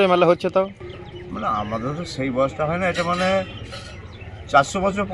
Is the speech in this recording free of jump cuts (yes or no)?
yes